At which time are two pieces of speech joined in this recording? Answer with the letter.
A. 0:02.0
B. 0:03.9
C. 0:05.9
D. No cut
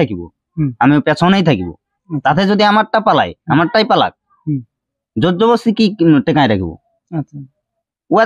D